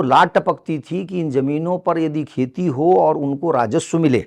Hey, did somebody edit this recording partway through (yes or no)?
no